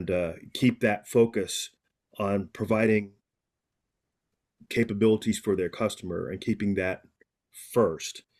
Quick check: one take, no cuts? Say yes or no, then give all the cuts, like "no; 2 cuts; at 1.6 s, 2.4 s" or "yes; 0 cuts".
yes; 0 cuts